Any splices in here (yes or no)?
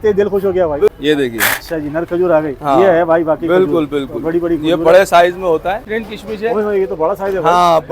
yes